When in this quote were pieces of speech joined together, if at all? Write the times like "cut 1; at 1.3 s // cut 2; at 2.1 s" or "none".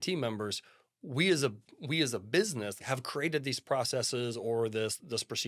cut 1; at 2.8 s